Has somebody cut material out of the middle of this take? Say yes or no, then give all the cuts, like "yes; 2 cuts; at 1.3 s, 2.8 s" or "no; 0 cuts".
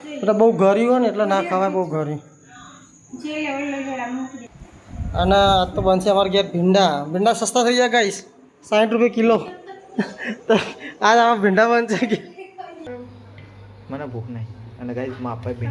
yes; 2 cuts; at 4.4 s, 12.9 s